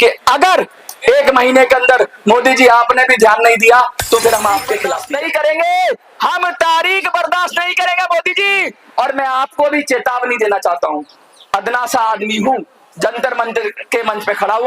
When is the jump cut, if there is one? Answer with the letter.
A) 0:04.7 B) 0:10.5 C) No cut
A